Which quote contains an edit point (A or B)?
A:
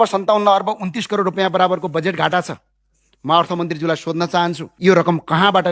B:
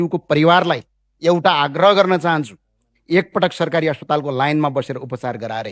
A